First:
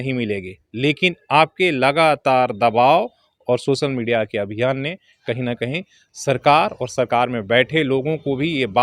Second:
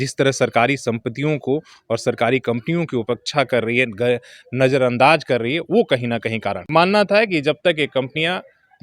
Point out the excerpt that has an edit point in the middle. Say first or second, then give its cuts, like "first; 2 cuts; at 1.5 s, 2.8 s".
second; 1 cut; at 6.6 s